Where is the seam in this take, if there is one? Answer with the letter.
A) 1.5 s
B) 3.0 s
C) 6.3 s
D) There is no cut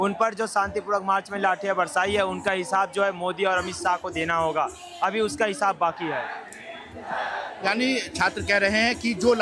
D